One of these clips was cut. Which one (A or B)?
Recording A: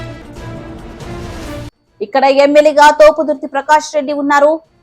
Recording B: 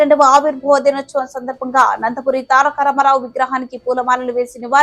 A